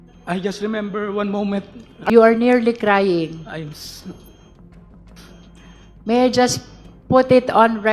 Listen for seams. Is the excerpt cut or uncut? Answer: cut